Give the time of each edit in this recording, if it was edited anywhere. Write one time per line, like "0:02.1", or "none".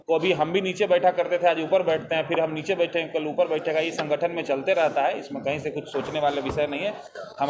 none